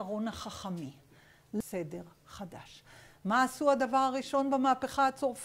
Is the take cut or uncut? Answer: cut